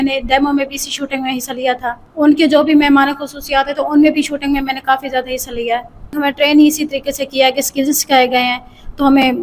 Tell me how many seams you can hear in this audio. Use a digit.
2